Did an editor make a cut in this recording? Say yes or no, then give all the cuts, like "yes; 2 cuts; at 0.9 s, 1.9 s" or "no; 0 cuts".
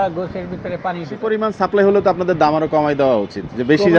yes; 1 cut; at 1.2 s